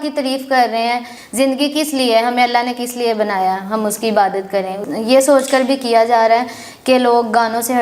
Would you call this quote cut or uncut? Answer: cut